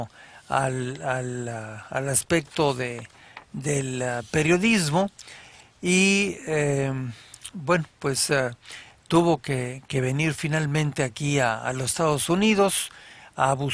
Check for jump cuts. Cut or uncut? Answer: cut